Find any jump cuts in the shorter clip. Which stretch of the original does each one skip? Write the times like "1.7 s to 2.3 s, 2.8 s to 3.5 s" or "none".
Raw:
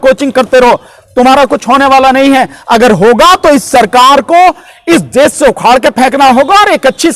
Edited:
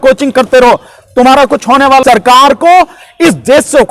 2.0 s to 3.7 s